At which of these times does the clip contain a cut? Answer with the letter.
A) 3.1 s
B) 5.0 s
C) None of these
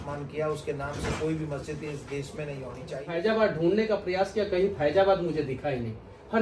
A